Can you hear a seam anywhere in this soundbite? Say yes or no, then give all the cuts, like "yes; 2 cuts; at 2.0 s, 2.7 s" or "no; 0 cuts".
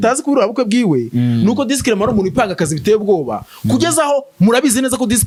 no; 0 cuts